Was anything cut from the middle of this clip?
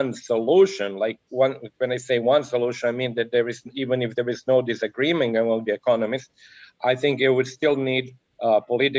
no; 0 cuts

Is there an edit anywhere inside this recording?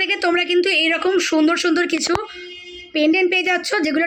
no; 0 cuts

